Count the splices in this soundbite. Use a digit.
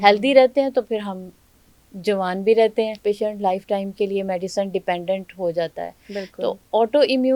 1